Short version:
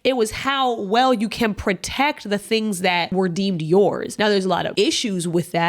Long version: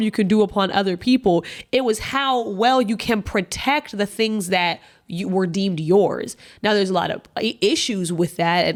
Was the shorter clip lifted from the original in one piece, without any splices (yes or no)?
no